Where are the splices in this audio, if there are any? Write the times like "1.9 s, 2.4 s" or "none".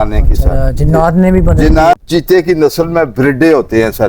1.9 s